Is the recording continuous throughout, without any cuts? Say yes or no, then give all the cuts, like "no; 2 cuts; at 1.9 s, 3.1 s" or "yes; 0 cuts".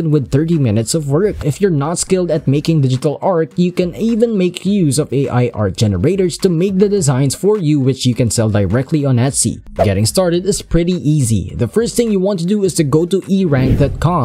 no; 2 cuts; at 1.4 s, 9.6 s